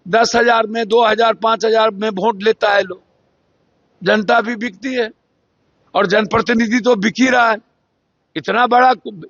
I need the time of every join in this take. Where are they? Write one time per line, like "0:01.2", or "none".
none